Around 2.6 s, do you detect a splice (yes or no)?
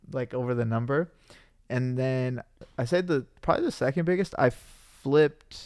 yes